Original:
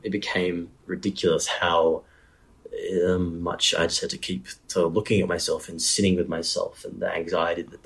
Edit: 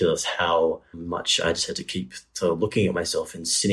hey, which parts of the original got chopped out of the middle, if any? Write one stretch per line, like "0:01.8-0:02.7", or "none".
0:02.2-0:03.4